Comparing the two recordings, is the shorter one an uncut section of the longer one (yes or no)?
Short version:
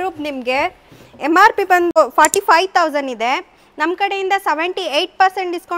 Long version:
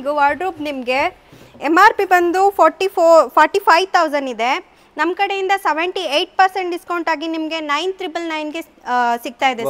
no